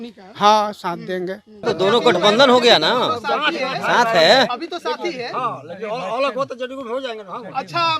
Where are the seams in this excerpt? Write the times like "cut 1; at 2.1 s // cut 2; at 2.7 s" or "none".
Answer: cut 1; at 1.6 s